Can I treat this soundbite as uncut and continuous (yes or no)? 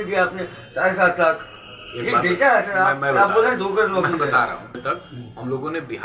no